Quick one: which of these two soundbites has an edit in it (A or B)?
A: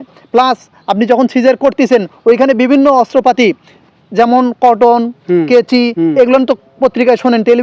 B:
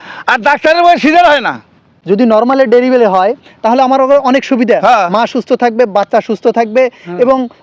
B